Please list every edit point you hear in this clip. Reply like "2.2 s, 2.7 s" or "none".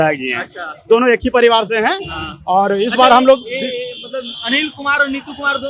none